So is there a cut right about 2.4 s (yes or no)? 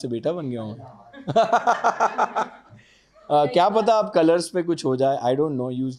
no